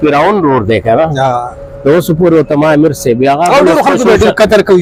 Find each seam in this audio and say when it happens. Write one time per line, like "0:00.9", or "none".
none